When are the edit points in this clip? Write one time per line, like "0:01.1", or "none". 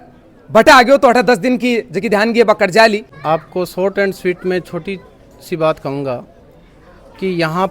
0:03.1